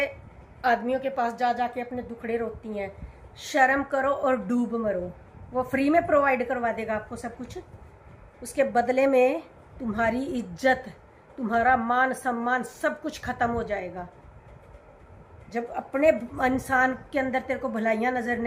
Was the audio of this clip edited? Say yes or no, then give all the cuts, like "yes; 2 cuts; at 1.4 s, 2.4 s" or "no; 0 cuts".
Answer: no; 0 cuts